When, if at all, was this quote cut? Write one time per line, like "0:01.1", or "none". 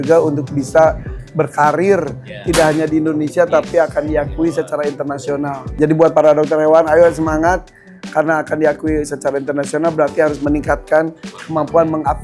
0:05.8